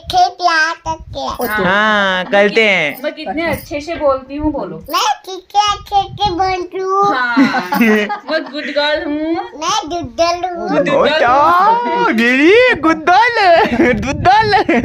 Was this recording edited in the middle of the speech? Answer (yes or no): no